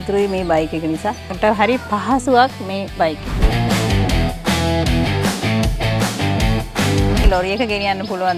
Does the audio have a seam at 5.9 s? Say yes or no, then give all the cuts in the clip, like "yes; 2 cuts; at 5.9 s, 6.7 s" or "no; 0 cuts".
no; 3 cuts; at 1.3 s, 3.4 s, 7.2 s